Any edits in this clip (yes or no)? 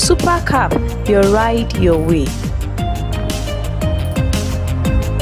no